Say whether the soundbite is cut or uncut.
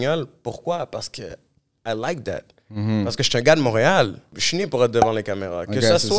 cut